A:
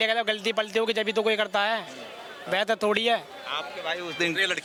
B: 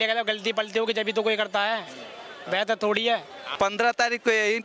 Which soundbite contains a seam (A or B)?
B